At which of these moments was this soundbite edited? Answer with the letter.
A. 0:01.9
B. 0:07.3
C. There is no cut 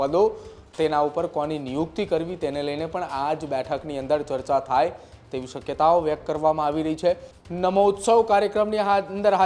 B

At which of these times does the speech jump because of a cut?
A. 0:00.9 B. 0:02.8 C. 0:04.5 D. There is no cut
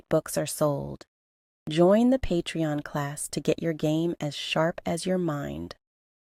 D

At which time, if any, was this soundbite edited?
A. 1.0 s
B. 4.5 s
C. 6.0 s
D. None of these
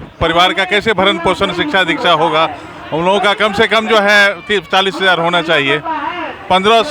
D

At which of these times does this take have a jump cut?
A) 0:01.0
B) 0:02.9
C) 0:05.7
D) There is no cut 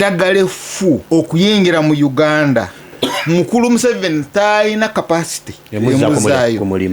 A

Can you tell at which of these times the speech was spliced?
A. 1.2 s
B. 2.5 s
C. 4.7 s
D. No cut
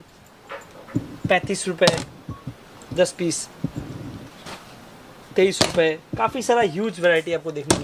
D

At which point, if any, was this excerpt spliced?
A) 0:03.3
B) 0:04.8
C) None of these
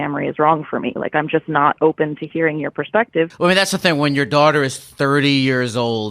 A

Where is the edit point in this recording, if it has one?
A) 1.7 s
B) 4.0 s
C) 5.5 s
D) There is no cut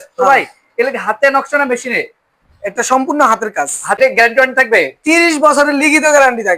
B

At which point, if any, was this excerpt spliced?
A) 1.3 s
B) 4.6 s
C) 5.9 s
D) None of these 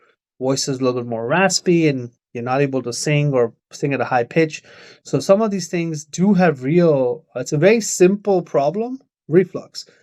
D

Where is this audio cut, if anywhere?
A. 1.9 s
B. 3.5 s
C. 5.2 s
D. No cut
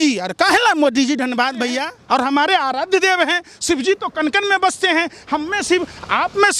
A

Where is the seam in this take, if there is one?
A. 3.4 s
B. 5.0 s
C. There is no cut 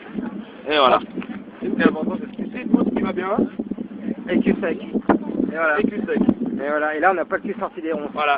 C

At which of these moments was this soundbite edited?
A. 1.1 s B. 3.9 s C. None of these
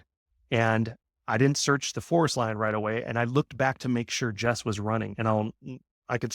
A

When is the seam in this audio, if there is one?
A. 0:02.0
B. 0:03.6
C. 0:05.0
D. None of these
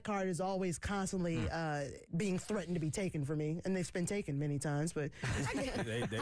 A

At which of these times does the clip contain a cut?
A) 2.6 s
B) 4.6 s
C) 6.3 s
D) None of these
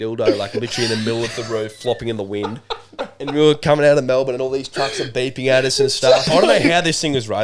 C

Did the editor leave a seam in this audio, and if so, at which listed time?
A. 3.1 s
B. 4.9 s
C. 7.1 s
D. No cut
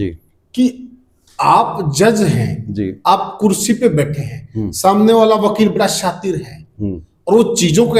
D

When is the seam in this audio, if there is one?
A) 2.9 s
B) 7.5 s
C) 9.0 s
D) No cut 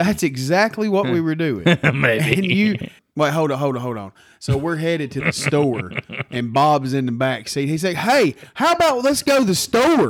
A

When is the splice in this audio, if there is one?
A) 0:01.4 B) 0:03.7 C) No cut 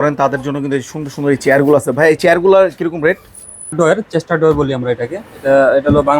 B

